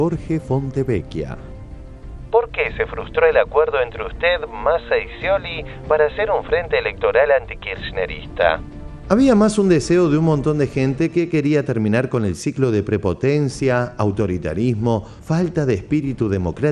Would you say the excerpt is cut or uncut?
uncut